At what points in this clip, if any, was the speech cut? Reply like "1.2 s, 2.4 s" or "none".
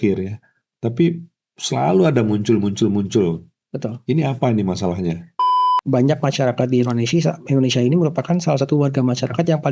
5.6 s